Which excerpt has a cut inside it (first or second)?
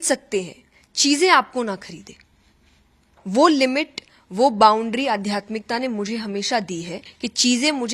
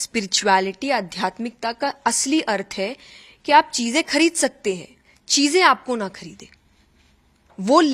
first